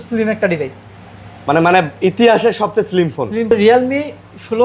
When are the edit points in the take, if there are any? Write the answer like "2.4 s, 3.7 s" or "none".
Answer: 3.5 s